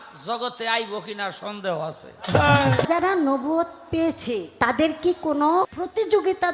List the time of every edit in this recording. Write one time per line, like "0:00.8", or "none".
0:02.9
0:04.5
0:05.7